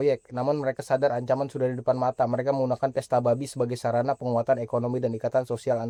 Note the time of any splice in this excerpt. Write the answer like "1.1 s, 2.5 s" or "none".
none